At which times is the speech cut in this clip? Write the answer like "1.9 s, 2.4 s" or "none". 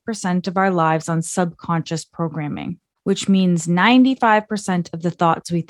2.9 s